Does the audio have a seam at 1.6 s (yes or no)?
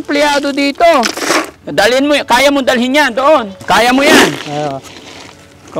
yes